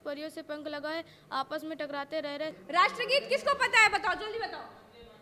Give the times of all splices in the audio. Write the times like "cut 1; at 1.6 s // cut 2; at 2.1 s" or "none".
cut 1; at 2.6 s

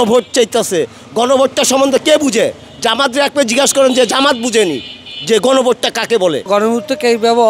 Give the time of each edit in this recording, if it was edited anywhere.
cut 1; at 6.4 s

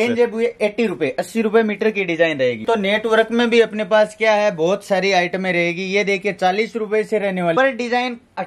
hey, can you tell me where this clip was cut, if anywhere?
cut 1; at 2.6 s // cut 2; at 7.5 s

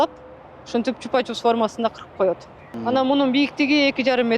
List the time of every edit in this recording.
cut 1; at 2.7 s

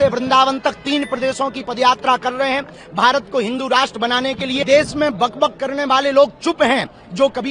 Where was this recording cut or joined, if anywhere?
cut 1; at 4.6 s

